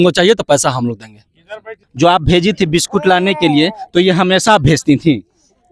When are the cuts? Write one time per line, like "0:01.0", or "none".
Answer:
0:01.8